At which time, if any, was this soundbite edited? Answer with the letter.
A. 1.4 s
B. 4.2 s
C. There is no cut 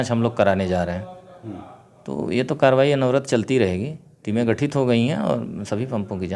C